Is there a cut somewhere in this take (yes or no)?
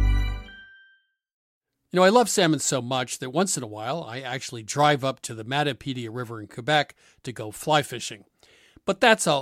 yes